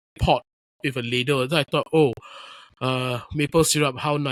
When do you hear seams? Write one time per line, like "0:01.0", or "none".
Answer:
none

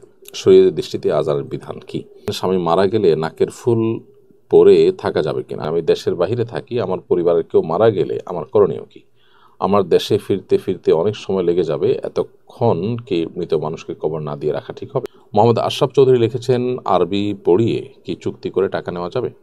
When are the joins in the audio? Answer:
0:02.2
0:05.5
0:15.0

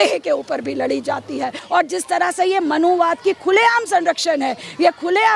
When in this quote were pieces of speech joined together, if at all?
0:01.6

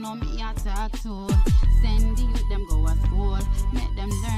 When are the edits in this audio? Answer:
0:01.5

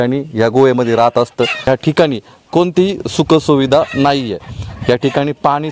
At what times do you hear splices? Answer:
0:01.6

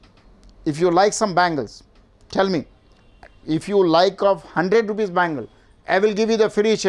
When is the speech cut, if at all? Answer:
none

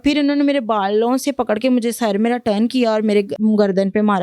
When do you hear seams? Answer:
0:03.3

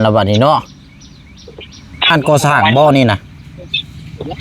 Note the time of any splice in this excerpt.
0:02.1

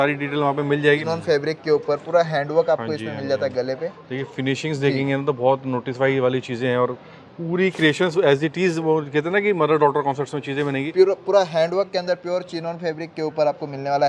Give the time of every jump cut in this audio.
0:01.0
0:10.8

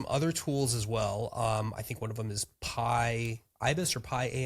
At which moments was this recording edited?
none

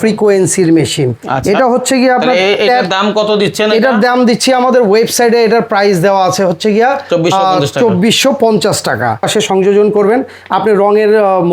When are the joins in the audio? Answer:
0:09.2

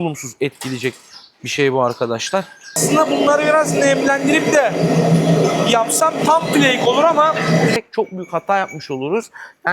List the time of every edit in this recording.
0:02.8
0:07.8

